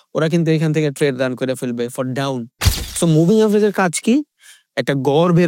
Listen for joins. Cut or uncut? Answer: cut